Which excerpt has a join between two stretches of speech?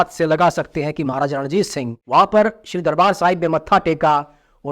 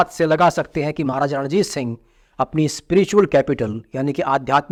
first; 1 cut; at 2.0 s

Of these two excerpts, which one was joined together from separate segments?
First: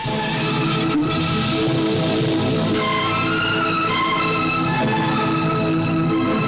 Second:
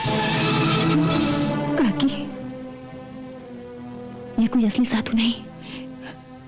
second; 1 cut; at 1.1 s

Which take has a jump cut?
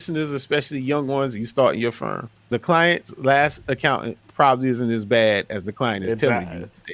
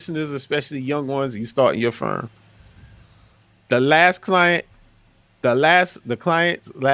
first; 1 cut; at 2.4 s

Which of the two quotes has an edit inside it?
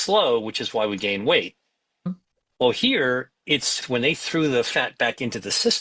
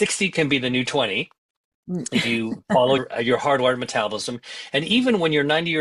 first; 1 cut; at 3.8 s

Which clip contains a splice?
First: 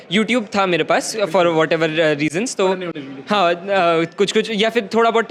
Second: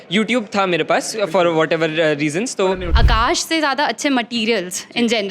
second; 1 cut; at 2.9 s

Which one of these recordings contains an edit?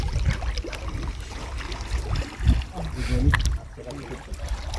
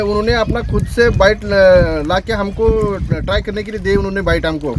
first; 1 cut; at 2.9 s

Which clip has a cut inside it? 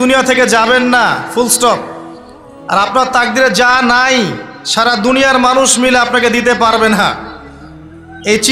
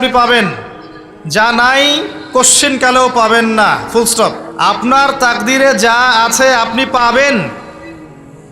second; 1 cut; at 4.5 s

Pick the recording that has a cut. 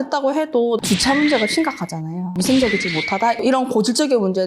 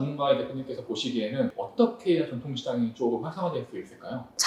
first; 3 cuts; at 0.8 s, 2.3 s, 3.4 s

